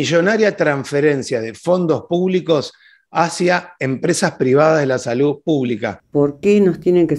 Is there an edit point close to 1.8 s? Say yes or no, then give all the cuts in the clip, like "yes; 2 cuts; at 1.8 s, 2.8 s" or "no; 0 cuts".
no; 1 cut; at 6.0 s